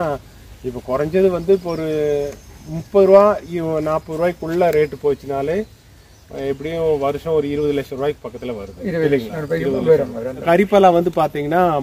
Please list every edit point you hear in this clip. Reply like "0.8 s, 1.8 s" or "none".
10.4 s